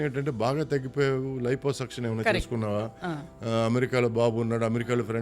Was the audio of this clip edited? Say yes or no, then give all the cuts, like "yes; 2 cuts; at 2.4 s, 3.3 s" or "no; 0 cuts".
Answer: no; 0 cuts